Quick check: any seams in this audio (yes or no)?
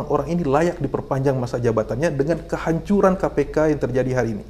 no